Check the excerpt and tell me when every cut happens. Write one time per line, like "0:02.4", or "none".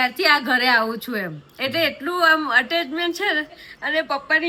none